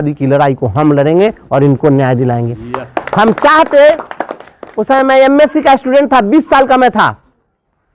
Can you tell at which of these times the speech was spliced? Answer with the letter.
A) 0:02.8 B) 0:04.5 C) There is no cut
C